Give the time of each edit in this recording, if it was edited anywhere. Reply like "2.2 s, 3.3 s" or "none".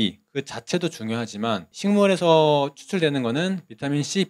1.7 s

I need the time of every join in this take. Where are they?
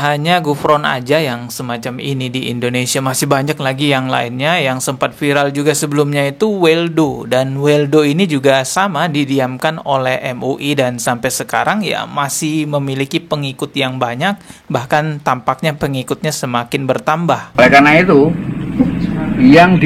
17.5 s

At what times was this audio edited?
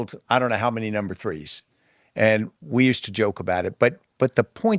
none

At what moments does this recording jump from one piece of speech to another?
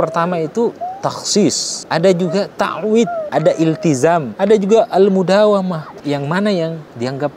1.7 s, 3.2 s, 4.3 s, 6.0 s

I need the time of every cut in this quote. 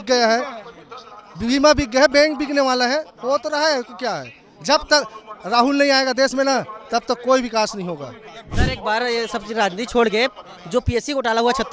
8.5 s

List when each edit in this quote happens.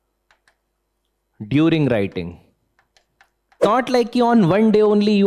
3.5 s

